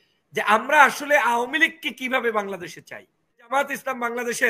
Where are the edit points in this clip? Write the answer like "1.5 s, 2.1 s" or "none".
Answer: 3.5 s